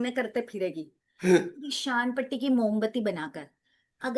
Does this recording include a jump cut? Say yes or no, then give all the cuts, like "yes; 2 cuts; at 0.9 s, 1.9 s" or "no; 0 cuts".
no; 0 cuts